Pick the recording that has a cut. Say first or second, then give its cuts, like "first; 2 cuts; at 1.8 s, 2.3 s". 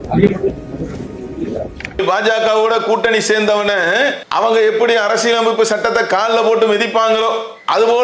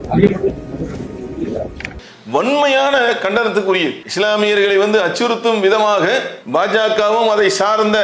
first; 2 cuts; at 2.0 s, 4.2 s